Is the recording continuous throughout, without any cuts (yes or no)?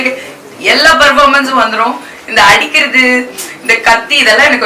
yes